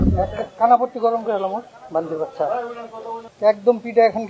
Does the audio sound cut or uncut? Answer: cut